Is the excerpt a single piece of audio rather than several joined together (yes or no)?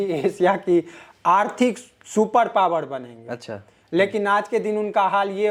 yes